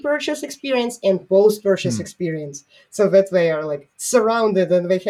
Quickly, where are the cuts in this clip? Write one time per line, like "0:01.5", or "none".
none